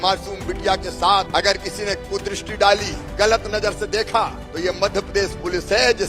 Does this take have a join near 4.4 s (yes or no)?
yes